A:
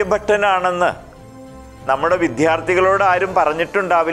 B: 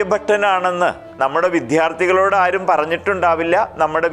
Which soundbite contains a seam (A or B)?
B